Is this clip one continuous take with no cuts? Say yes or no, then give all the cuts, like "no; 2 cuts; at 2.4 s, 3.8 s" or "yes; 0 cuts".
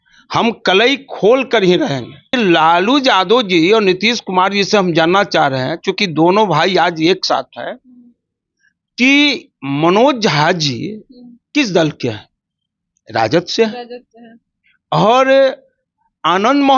no; 1 cut; at 2.3 s